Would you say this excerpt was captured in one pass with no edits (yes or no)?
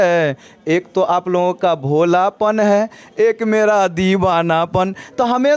yes